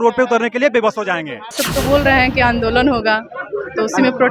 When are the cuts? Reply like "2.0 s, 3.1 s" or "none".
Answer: 1.6 s